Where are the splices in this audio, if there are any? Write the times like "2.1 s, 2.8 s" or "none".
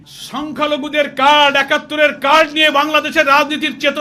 none